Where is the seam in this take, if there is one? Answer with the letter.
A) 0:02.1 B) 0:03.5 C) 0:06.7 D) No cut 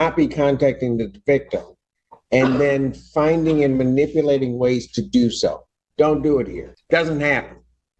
C